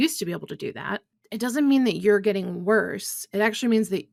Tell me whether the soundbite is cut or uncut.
uncut